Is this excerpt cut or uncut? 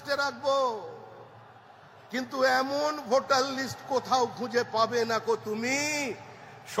uncut